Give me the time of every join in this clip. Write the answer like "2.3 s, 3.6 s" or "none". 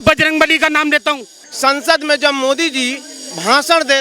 1.4 s